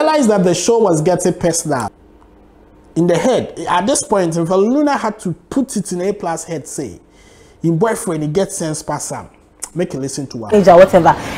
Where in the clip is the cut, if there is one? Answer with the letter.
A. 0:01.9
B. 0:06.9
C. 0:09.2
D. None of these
A